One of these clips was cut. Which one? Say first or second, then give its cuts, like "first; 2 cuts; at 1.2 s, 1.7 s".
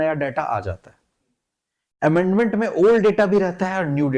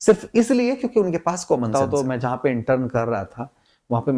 second; 1 cut; at 1.7 s